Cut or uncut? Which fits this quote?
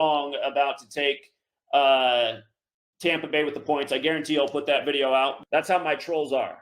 cut